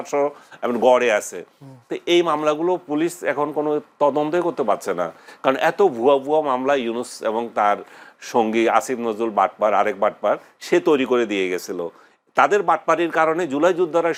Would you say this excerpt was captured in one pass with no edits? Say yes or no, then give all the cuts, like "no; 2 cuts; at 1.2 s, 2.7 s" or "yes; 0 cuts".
yes; 0 cuts